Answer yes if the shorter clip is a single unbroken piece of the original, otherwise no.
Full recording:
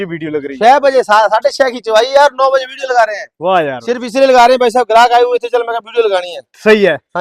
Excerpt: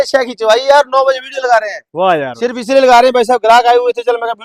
yes